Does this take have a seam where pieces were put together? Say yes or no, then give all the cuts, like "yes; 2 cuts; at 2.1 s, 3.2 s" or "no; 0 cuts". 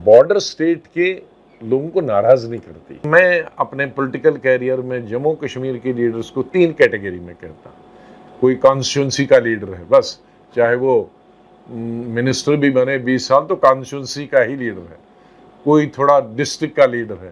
yes; 1 cut; at 3.1 s